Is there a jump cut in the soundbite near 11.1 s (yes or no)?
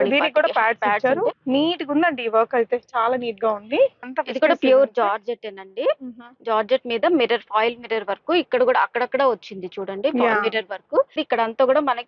yes